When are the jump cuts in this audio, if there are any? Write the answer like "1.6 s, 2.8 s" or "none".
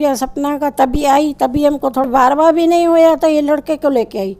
2.1 s